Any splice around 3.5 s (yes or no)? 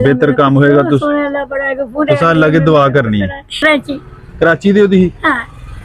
yes